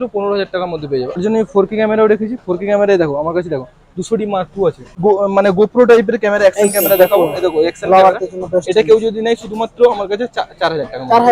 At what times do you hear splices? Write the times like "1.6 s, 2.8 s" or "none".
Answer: 1.2 s, 4.9 s

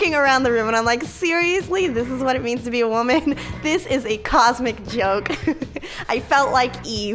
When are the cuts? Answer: none

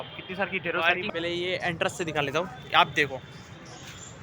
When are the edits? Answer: 1.0 s

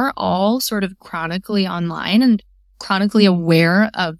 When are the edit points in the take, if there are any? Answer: none

